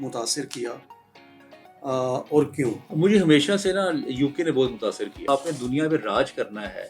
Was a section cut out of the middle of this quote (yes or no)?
yes